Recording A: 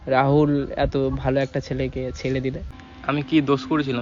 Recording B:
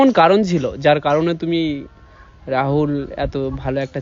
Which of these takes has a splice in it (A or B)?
A